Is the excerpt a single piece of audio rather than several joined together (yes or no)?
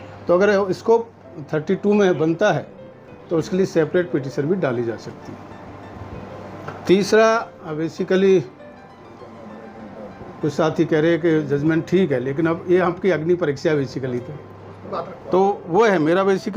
no